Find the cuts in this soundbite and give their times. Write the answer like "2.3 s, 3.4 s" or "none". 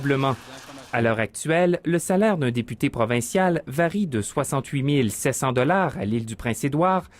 4.3 s

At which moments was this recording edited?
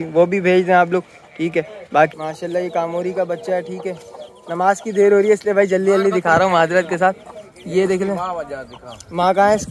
2.1 s

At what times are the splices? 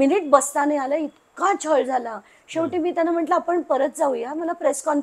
none

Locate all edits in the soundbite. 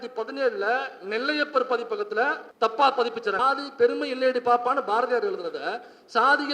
2.4 s, 3.4 s

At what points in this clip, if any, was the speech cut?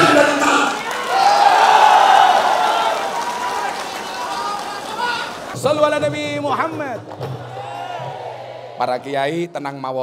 5.5 s

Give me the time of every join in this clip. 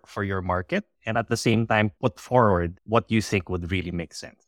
1.9 s, 2.8 s

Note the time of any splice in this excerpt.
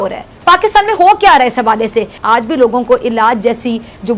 2.2 s

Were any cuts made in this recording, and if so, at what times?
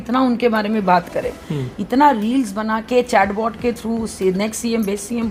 none

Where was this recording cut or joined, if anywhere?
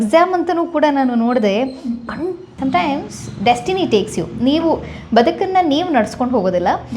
2.5 s

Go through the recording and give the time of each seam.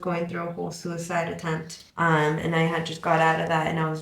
1.8 s

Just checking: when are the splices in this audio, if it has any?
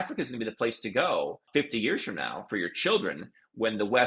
1.4 s

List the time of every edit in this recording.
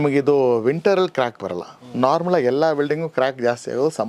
none

